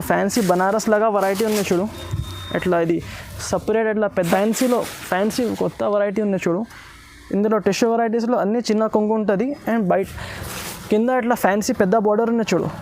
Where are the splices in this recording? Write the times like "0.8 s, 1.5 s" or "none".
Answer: 4.3 s